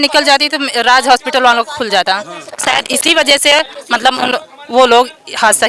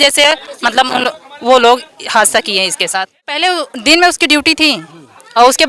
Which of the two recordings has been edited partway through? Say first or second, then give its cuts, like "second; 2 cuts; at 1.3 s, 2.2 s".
second; 1 cut; at 3.4 s